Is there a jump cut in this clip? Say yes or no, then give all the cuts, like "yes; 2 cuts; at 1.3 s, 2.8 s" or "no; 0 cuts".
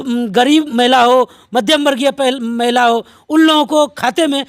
no; 0 cuts